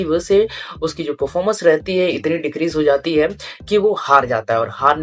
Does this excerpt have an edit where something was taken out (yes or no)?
no